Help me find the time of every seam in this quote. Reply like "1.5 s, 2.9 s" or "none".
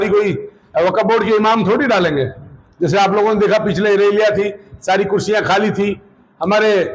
none

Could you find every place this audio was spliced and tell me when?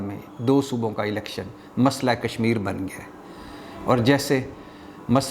none

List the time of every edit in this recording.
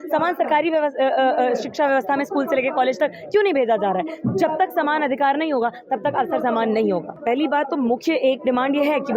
none

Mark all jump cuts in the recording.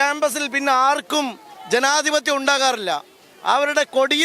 none

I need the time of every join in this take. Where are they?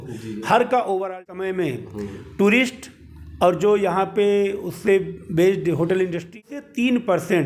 1.2 s, 6.4 s

